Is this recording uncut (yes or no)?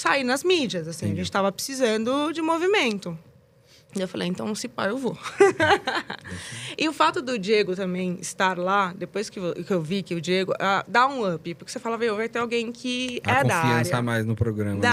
yes